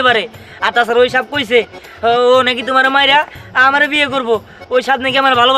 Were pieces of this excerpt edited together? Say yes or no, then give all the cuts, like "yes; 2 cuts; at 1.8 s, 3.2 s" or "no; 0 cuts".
no; 0 cuts